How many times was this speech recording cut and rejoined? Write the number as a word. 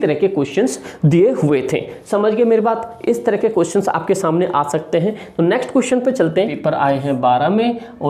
one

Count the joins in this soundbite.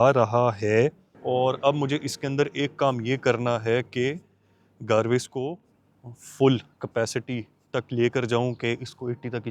one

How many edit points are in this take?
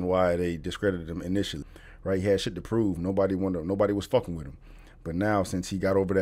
one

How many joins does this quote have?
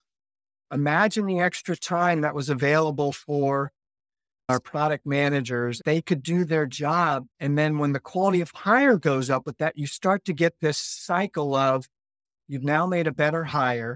three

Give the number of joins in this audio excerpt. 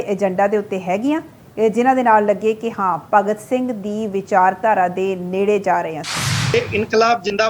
one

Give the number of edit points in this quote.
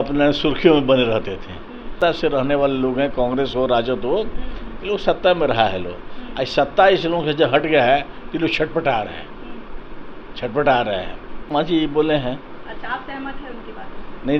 two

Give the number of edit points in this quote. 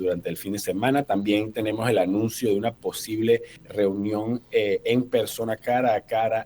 one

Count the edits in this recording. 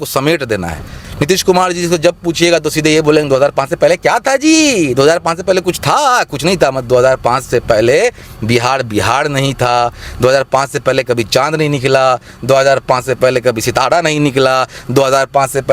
one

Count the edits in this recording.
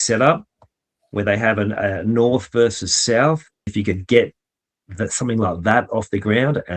one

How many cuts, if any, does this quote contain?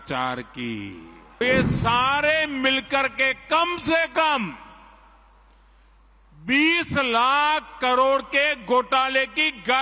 one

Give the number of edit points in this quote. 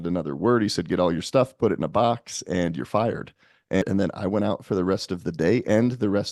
one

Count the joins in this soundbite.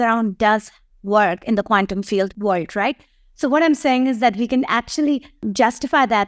two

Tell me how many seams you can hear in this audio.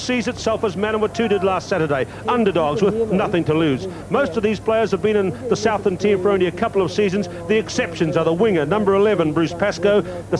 one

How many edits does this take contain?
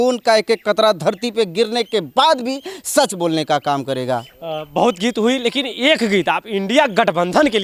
zero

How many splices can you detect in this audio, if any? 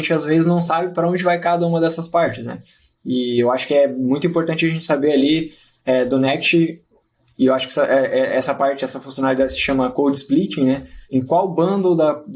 zero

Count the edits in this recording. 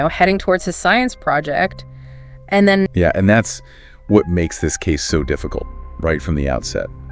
one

